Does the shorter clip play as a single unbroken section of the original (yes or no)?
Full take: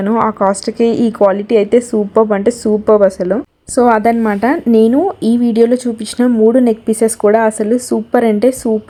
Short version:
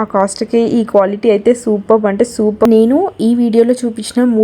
no